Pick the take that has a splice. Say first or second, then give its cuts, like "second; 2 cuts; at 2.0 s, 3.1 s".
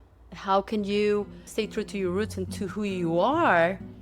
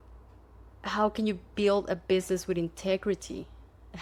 first; 1 cut; at 1.5 s